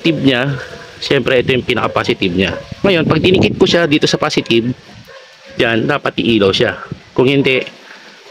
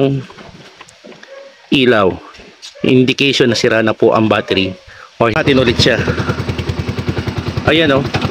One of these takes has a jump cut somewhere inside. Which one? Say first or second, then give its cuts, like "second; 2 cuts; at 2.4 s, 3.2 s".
second; 1 cut; at 5.4 s